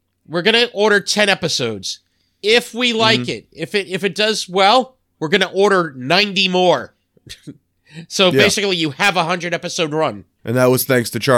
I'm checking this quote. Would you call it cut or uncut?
cut